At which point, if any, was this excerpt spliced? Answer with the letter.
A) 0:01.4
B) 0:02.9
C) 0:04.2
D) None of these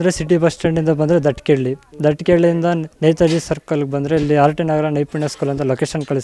B